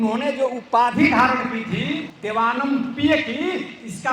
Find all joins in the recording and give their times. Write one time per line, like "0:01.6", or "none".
0:02.1